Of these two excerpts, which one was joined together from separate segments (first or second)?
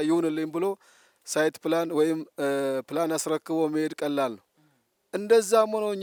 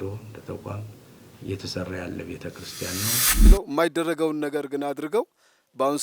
second